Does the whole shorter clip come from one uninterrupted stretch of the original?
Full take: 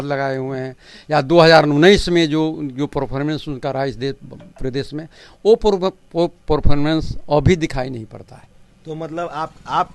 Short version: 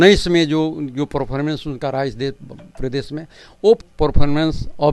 no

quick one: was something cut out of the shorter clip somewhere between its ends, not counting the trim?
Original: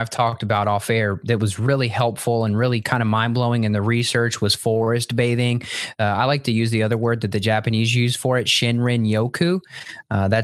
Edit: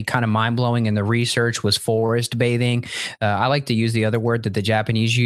no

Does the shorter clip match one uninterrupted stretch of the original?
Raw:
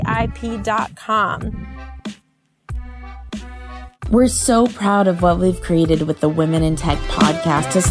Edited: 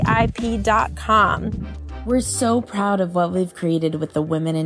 no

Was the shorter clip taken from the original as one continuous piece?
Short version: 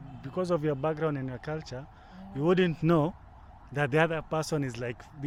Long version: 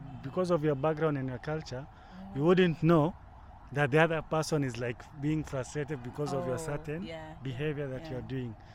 yes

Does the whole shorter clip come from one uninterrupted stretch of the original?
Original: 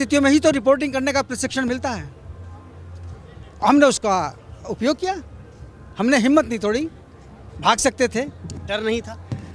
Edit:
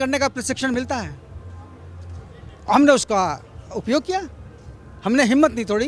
yes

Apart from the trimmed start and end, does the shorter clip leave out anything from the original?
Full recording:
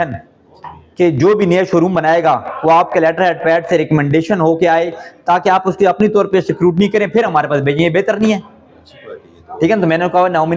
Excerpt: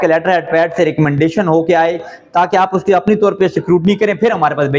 no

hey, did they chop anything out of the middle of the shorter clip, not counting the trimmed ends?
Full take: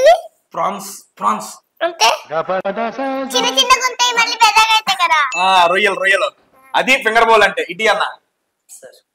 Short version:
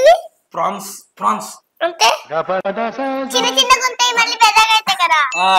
no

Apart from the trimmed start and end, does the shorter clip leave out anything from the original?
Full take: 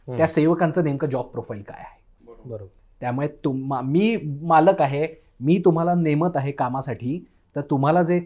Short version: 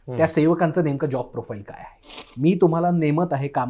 yes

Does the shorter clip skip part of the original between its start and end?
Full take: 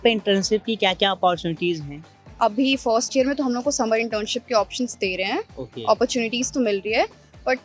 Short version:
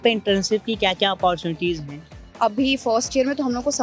no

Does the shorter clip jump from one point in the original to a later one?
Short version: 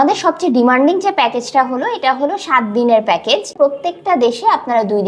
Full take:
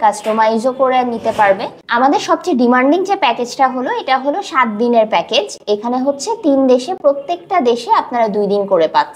yes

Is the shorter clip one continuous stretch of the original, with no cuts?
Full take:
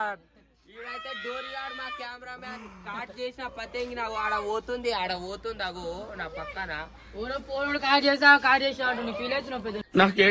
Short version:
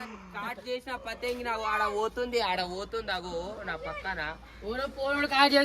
yes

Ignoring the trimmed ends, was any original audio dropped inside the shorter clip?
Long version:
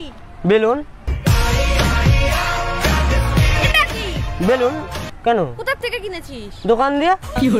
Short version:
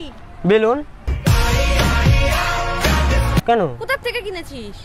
yes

